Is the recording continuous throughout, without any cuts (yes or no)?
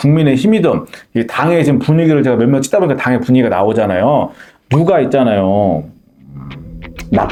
yes